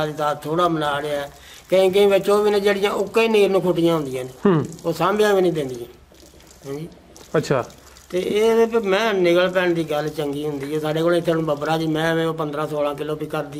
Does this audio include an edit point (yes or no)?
no